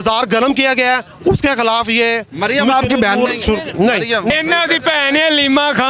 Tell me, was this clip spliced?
yes; 1 cut; at 4.3 s

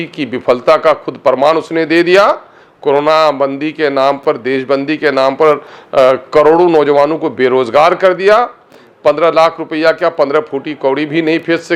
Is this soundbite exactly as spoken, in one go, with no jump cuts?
yes; 0 cuts

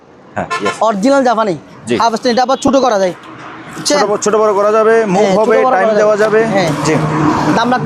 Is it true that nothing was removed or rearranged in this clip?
yes; 0 cuts

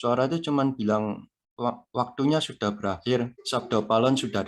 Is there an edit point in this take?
yes; 1 cut; at 3.4 s

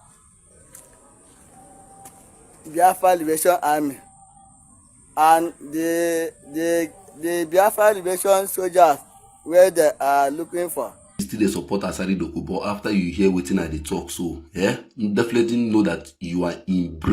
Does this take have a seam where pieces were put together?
yes; 1 cut; at 11.2 s

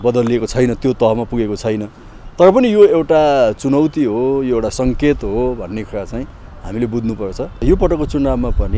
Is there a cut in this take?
yes; 1 cut; at 7.6 s

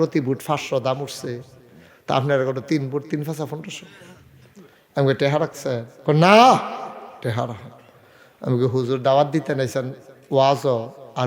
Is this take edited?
no; 0 cuts

